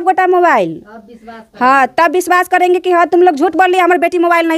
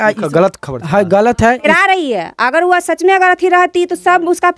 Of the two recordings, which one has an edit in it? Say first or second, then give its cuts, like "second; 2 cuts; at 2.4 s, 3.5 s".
second; 1 cut; at 1.7 s